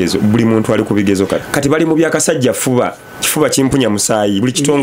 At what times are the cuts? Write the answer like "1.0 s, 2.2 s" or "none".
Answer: 1.4 s